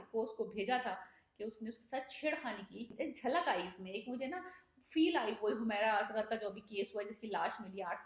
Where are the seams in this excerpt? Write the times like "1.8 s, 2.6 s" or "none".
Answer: 2.9 s